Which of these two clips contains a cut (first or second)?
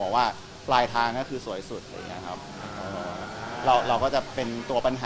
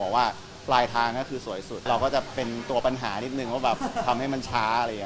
second